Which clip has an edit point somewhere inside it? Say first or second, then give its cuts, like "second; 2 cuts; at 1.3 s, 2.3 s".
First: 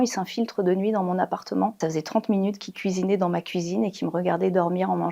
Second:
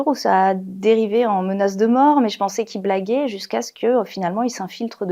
first; 1 cut; at 1.8 s